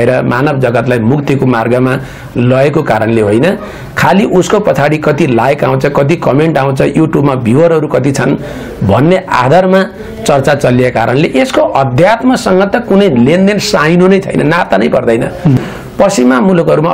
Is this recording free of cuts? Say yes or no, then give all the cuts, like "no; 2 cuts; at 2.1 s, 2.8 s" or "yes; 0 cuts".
no; 1 cut; at 15.6 s